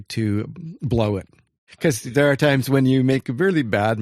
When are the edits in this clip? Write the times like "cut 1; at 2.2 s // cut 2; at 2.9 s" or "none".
cut 1; at 1.6 s